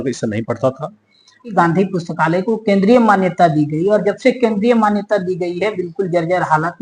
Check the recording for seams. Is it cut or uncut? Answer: cut